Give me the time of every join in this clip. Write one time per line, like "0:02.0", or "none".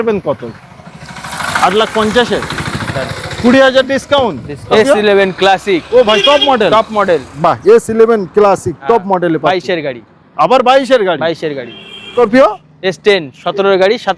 0:04.7
0:12.1